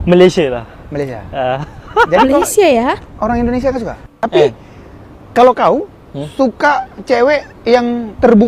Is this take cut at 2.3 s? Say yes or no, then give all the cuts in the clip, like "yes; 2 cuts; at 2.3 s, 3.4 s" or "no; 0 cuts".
no; 0 cuts